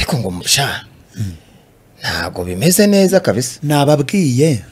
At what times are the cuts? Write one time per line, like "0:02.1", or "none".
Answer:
0:03.5